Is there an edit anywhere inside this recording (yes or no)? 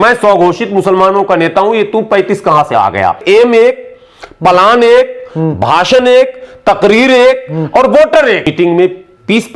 yes